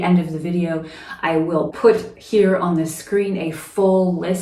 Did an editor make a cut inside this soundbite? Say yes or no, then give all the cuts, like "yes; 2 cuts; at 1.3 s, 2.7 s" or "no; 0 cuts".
yes; 1 cut; at 1.7 s